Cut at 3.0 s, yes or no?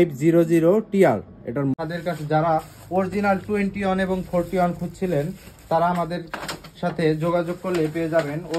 no